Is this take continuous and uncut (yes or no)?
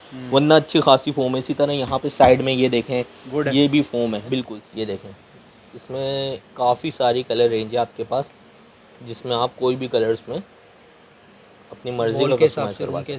no